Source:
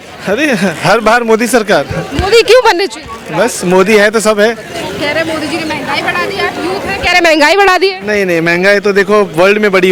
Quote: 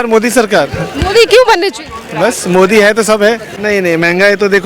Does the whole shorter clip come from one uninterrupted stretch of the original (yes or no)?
no